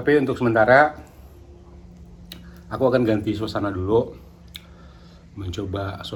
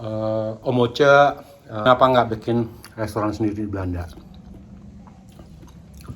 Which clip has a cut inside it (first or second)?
second